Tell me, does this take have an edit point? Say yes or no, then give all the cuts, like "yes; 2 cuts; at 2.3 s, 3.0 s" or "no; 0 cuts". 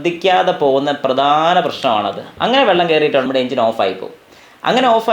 yes; 1 cut; at 3.2 s